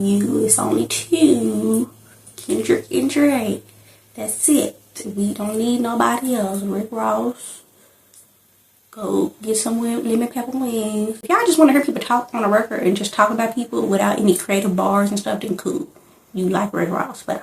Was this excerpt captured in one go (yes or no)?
no